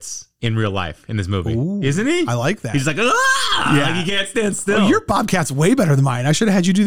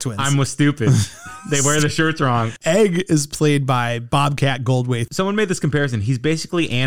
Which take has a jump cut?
second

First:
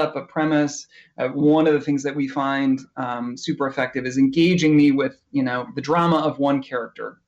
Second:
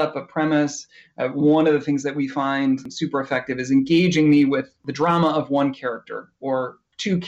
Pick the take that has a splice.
second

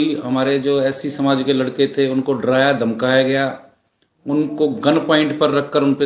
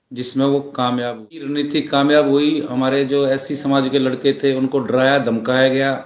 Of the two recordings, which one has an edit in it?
second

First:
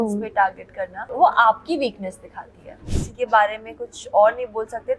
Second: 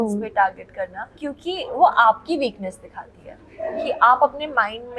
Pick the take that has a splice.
first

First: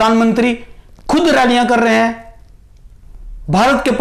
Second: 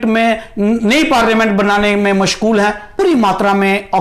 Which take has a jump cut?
second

